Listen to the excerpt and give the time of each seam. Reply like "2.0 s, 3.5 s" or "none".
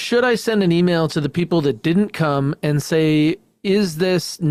none